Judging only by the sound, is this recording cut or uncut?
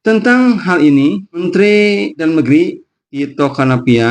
cut